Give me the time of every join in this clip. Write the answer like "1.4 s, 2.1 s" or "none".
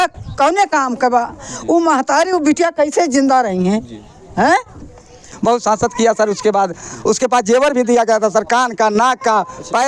5.2 s